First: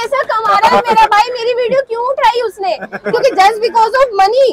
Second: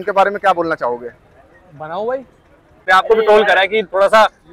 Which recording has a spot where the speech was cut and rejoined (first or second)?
second